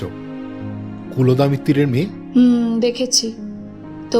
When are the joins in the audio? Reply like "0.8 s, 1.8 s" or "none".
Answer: 2.2 s

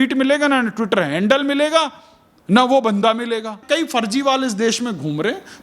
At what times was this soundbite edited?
3.6 s

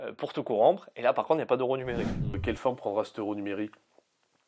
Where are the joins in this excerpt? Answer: 2.3 s

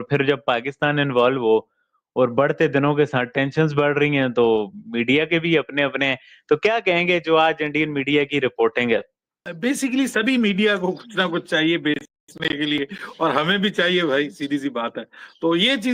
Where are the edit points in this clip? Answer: none

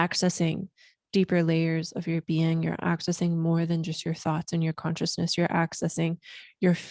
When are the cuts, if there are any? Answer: none

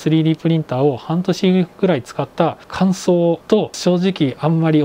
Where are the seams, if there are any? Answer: 2.6 s, 3.8 s

